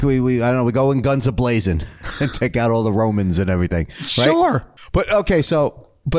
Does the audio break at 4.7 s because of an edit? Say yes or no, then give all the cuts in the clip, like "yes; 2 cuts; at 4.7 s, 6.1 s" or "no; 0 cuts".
yes; 1 cut; at 4.7 s